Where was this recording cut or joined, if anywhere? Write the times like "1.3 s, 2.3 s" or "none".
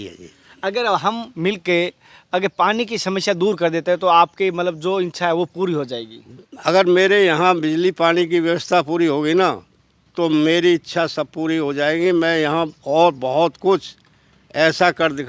none